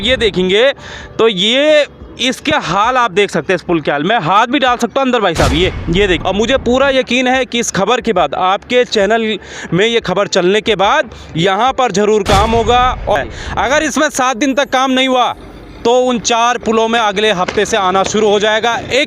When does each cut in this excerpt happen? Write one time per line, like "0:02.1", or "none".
0:06.2
0:13.2